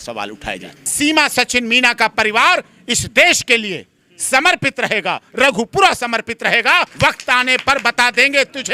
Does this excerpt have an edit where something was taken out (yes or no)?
yes